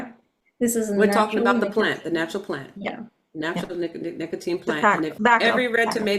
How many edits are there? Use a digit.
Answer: 1